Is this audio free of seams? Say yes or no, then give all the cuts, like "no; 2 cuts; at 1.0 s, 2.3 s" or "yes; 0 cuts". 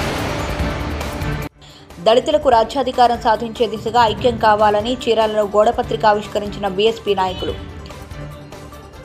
no; 1 cut; at 1.1 s